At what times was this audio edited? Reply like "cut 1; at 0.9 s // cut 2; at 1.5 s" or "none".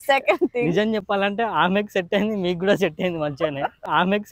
none